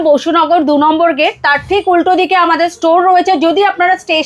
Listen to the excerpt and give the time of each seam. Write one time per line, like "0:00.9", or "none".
none